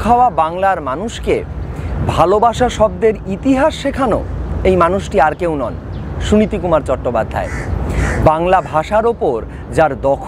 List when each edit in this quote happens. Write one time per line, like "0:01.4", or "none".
none